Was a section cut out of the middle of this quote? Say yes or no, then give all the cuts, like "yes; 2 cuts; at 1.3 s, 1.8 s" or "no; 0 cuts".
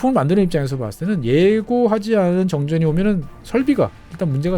no; 0 cuts